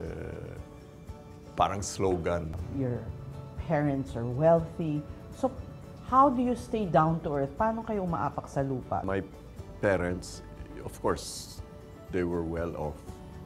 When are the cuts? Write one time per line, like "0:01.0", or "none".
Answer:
0:02.6
0:09.0